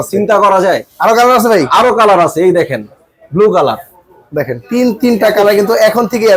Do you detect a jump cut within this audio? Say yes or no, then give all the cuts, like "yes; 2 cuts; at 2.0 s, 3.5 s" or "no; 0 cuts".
no; 0 cuts